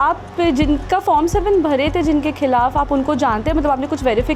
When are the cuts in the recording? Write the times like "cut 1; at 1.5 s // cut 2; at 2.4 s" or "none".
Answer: none